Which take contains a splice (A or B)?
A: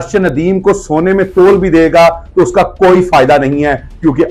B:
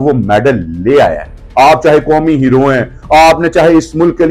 B